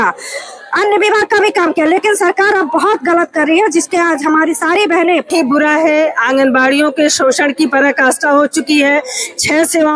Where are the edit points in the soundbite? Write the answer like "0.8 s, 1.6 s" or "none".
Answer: 5.2 s